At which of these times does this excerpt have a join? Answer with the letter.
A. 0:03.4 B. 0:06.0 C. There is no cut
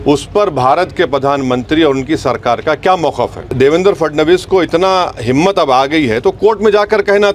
A